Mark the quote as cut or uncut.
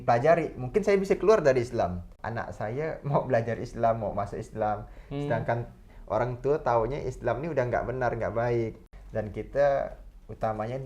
cut